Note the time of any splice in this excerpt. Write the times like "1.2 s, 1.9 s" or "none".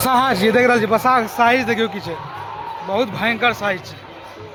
none